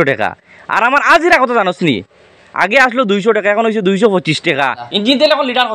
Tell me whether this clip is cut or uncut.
cut